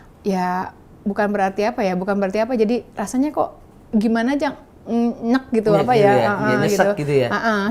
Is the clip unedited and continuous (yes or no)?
yes